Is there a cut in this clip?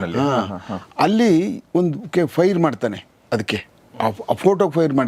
no; 0 cuts

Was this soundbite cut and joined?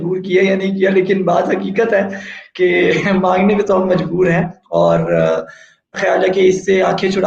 no; 0 cuts

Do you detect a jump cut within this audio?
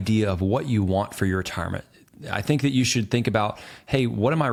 no; 0 cuts

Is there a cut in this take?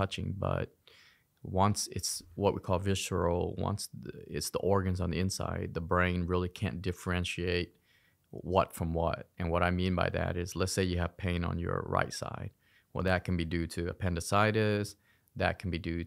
no; 0 cuts

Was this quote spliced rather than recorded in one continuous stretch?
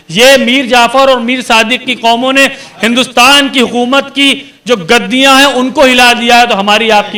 no; 0 cuts

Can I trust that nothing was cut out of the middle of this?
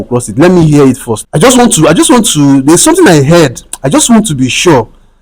no; 1 cut; at 1.1 s

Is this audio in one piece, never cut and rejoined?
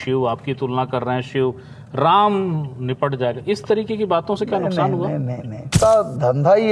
no; 1 cut; at 5.7 s

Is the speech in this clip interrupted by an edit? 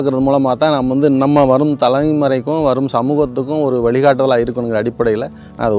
no; 0 cuts

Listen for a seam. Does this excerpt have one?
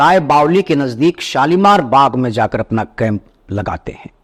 no; 0 cuts

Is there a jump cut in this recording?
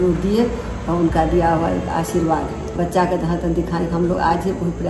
no; 0 cuts

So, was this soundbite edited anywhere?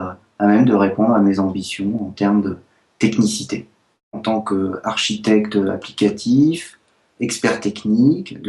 yes; 1 cut; at 4.2 s

